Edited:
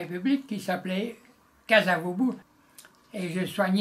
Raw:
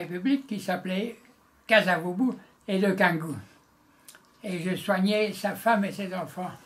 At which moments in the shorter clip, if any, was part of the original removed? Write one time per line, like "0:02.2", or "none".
0:02.5